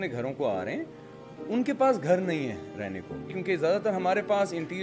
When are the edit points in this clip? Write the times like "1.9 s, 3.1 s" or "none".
3.3 s